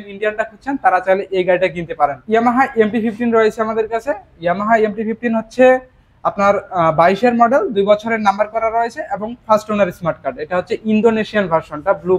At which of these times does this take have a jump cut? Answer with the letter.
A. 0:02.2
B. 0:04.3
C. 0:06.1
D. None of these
A